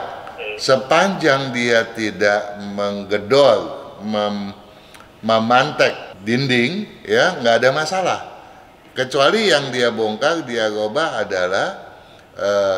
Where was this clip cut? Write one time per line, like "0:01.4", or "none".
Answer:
0:06.1
0:06.9